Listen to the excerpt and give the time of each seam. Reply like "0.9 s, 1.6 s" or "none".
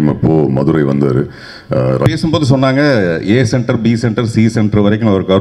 2.1 s